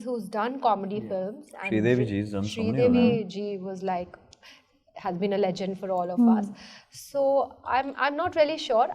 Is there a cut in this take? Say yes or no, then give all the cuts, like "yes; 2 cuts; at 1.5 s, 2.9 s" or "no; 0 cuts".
no; 0 cuts